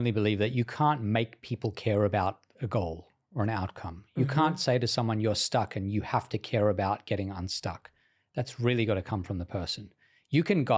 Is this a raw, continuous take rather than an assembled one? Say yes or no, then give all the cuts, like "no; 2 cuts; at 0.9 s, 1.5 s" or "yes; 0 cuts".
yes; 0 cuts